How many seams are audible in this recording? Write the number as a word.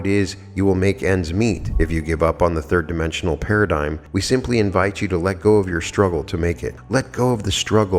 three